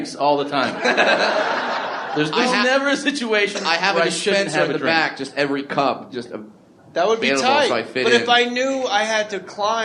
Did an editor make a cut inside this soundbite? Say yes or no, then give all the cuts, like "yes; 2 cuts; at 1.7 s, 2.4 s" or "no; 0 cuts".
no; 0 cuts